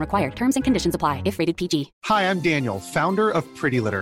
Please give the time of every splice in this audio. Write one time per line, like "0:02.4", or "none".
0:01.9